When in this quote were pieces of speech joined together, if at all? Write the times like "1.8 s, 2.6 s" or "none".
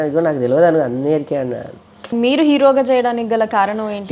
2.1 s